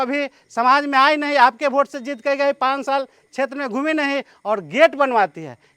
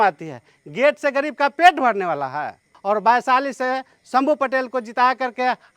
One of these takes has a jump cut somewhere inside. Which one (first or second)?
second